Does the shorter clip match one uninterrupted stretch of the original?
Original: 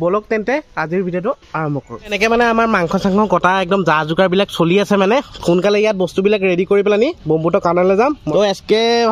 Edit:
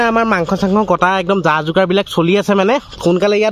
yes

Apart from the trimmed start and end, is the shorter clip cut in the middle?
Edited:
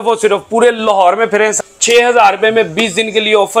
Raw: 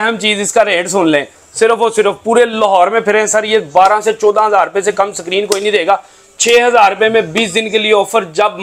yes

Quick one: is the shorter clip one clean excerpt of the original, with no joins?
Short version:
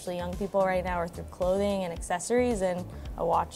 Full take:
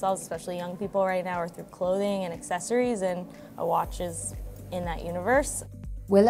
yes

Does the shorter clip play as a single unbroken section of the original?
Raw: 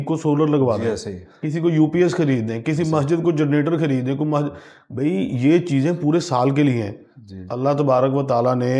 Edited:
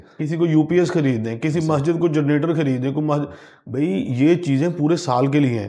yes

